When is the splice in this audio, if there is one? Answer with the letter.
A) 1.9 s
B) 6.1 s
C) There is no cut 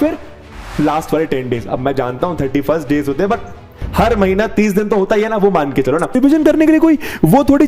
B